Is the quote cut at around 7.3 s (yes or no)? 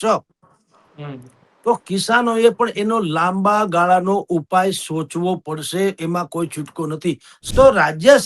yes